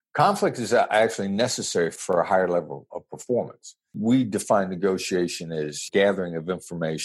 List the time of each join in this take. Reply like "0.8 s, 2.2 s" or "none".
2.0 s, 4.0 s, 5.9 s